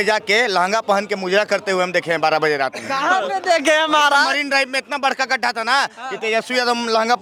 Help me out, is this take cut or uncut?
uncut